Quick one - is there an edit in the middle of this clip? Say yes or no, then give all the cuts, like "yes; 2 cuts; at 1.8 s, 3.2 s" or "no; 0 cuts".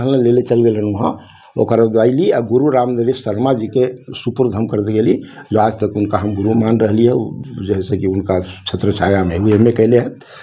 no; 0 cuts